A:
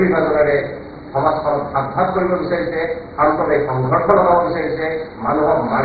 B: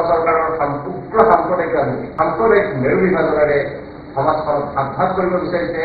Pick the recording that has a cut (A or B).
B